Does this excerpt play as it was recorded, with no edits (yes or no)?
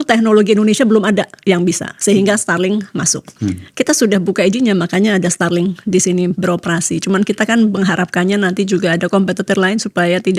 yes